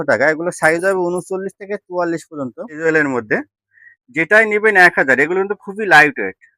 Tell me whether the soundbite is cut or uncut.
cut